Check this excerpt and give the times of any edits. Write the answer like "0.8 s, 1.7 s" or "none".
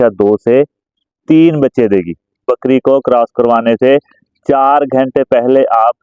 2.5 s